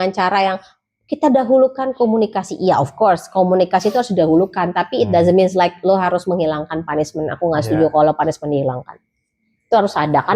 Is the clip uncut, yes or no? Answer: yes